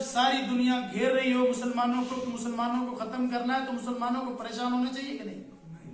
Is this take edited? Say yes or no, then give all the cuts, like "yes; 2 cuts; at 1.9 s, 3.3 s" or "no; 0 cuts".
no; 0 cuts